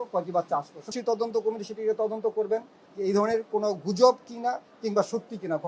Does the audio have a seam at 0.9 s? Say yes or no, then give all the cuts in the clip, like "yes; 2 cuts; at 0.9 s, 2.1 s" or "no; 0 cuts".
yes; 1 cut; at 0.9 s